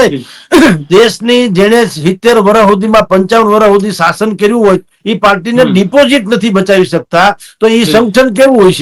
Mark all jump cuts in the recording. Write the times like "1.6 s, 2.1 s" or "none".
none